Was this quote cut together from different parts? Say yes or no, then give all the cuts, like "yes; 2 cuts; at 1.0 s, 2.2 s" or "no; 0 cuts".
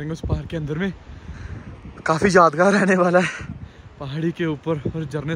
no; 0 cuts